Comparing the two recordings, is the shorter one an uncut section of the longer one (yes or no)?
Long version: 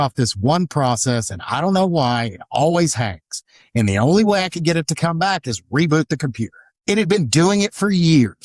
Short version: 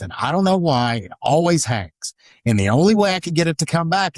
yes